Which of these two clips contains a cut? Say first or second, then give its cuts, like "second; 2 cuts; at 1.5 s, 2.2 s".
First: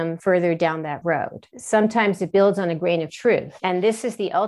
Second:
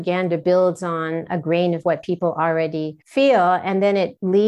first; 2 cuts; at 1.5 s, 3.5 s